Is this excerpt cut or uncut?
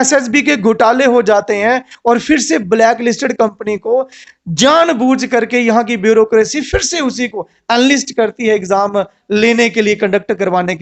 uncut